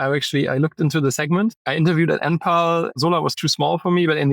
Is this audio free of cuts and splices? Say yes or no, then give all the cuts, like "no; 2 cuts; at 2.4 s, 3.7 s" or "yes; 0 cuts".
no; 2 cuts; at 1.6 s, 2.9 s